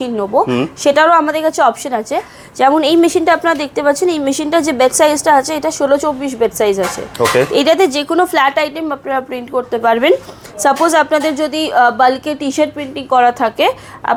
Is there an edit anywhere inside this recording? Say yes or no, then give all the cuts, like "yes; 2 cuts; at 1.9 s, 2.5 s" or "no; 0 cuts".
no; 0 cuts